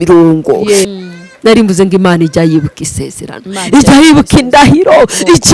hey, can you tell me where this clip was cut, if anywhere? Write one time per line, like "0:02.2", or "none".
0:00.9